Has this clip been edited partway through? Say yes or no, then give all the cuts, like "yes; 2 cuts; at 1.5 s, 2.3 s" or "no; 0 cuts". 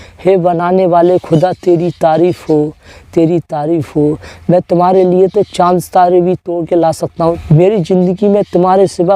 yes; 1 cut; at 7.4 s